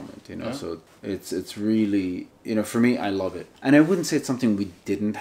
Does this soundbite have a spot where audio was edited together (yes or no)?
yes